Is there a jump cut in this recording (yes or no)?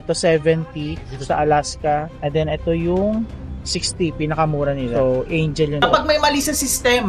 yes